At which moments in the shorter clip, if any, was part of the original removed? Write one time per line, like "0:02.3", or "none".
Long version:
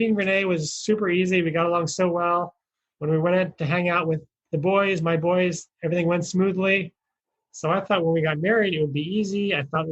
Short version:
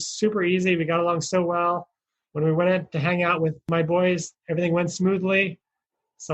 0:03.7